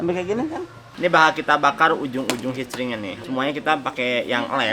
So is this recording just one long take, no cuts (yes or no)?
no